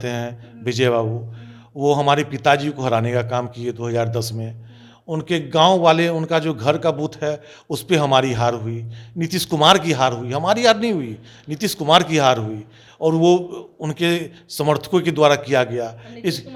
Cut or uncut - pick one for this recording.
uncut